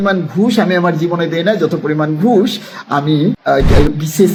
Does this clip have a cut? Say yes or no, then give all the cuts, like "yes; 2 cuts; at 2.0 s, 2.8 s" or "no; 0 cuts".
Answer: no; 0 cuts